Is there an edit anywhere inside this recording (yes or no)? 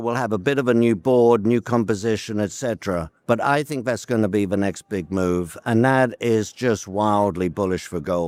no